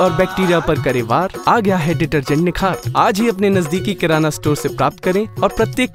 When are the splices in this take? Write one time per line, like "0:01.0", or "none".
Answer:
none